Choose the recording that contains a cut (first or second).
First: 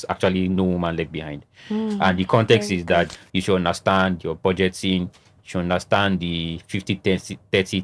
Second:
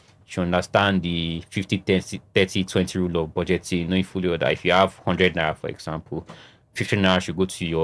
first